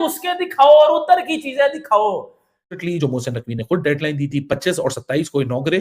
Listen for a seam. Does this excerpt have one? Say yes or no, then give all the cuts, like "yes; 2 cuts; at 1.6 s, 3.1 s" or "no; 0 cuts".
yes; 1 cut; at 2.8 s